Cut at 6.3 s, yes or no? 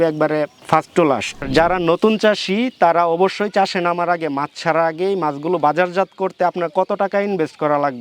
no